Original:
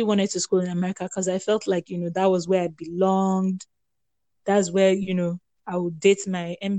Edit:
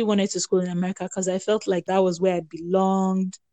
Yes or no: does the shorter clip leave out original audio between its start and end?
yes